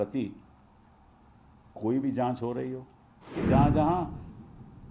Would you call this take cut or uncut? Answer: cut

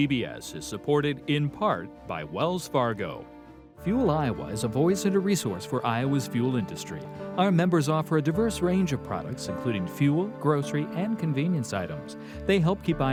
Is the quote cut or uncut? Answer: uncut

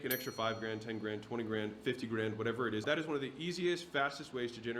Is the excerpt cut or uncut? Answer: cut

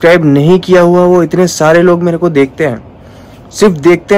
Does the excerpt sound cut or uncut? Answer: uncut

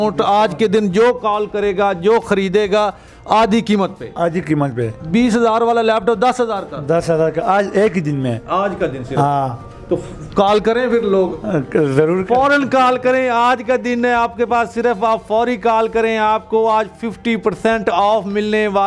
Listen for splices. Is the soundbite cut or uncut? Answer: uncut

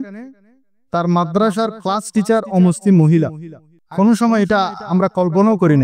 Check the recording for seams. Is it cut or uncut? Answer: cut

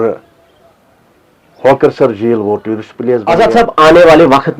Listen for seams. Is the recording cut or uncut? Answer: cut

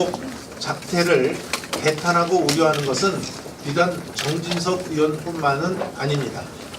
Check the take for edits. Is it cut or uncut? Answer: uncut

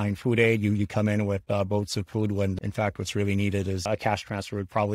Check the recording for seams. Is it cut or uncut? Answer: cut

